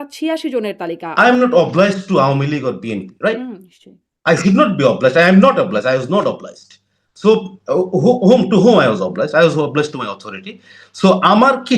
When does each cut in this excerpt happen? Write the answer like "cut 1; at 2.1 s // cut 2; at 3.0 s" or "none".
cut 1; at 1.0 s